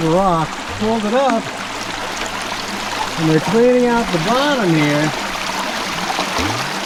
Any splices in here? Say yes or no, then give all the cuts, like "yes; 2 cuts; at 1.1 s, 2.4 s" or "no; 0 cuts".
no; 0 cuts